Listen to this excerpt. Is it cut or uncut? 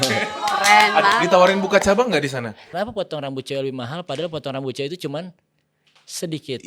cut